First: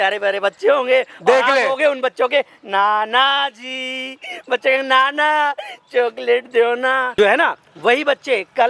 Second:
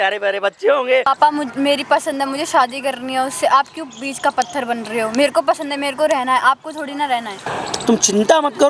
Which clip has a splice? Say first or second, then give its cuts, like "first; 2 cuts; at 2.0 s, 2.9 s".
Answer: second; 2 cuts; at 1.0 s, 7.5 s